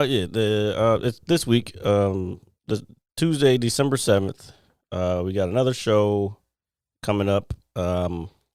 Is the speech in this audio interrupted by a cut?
no; 0 cuts

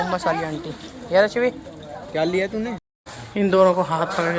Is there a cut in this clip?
yes; 1 cut; at 2.8 s

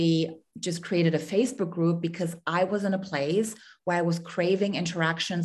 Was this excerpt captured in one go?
yes; 0 cuts

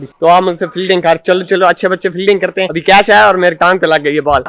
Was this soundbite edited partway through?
yes; 1 cut; at 2.7 s

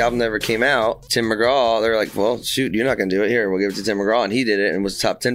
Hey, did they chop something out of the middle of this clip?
yes; 1 cut; at 1.0 s

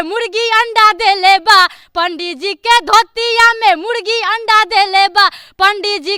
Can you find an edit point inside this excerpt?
no; 0 cuts

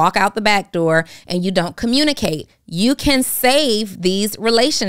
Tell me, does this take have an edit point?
no; 0 cuts

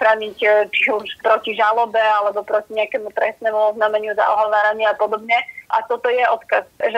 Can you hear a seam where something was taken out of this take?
yes; 1 cut; at 1.1 s

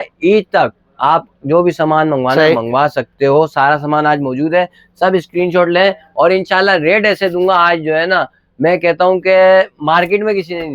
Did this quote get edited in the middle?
no; 0 cuts

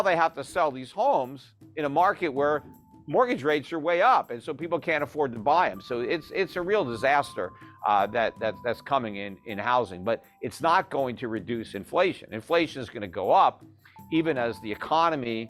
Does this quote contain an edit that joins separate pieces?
no; 0 cuts

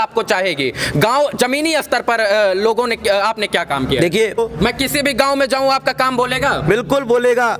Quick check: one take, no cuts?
no; 1 cut; at 4.4 s

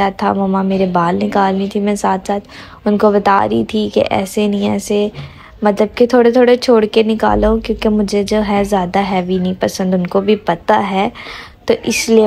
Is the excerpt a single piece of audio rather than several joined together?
yes; 0 cuts

